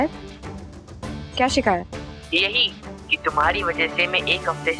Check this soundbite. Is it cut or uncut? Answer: uncut